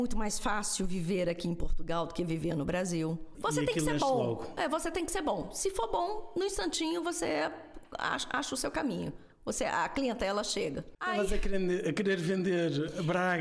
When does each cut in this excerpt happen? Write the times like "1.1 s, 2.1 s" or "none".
3.3 s, 10.9 s